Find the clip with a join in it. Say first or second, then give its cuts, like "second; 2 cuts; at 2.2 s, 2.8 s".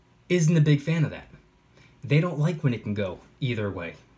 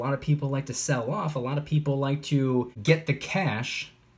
second; 1 cut; at 2.7 s